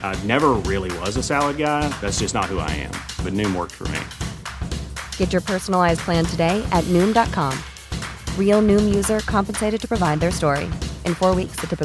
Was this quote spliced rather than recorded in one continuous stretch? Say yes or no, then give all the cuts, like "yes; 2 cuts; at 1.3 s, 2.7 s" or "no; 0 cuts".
no; 0 cuts